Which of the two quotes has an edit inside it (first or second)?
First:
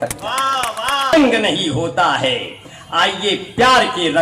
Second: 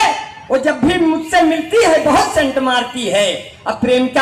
first